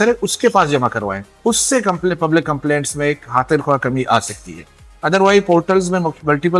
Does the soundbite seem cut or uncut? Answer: uncut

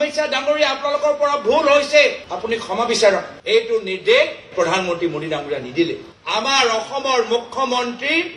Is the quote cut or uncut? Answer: cut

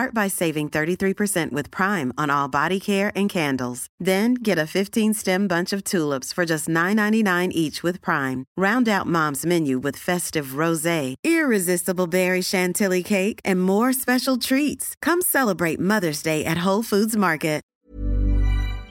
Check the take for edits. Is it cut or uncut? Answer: cut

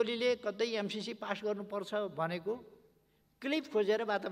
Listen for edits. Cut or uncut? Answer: uncut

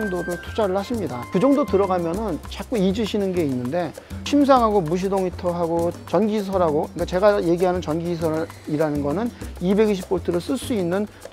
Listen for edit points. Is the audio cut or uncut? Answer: uncut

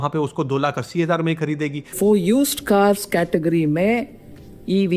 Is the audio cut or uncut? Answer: cut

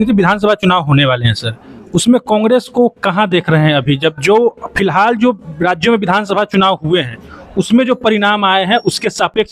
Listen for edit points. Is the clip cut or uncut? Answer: uncut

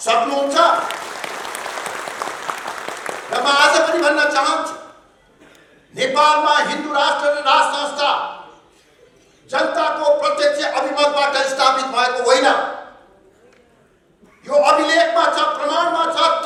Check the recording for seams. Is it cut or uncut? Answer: uncut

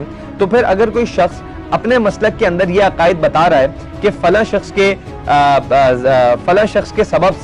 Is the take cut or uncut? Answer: uncut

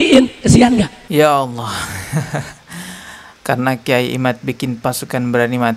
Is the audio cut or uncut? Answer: cut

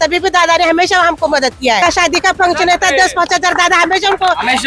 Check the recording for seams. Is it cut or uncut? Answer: cut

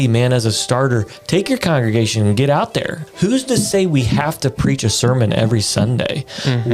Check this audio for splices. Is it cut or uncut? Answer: cut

